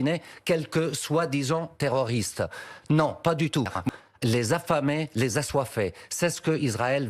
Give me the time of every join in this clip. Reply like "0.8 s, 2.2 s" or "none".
3.8 s